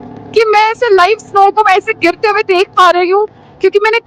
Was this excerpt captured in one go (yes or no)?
yes